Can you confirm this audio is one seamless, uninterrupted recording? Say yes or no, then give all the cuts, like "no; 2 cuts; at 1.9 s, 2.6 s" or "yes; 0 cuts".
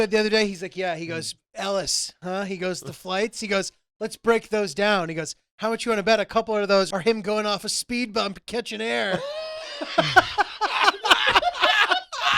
no; 1 cut; at 6.9 s